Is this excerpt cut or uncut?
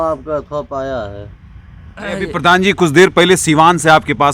cut